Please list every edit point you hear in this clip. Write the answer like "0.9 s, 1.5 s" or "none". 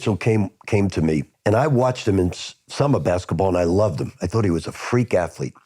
1.3 s